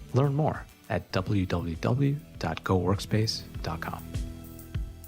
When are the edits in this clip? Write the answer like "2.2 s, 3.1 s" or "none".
4.0 s